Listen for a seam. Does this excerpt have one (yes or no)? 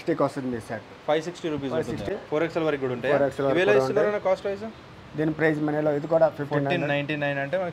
yes